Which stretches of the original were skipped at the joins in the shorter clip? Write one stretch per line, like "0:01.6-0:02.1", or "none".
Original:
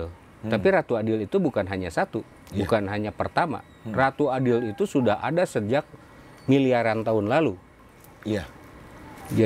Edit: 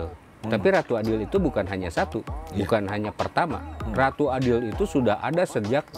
none